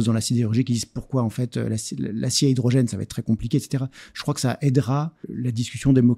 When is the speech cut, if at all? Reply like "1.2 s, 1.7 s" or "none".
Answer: 4.0 s, 5.2 s